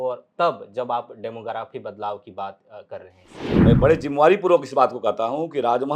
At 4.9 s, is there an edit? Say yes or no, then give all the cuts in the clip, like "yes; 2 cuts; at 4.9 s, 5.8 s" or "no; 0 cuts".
no; 1 cut; at 3.7 s